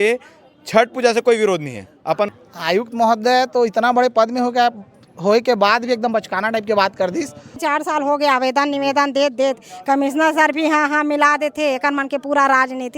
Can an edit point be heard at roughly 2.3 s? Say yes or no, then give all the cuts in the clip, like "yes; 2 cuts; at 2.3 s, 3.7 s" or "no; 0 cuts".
yes; 2 cuts; at 2.3 s, 7.6 s